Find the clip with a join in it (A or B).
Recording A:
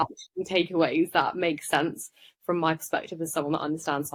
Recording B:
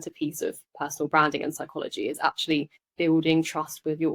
B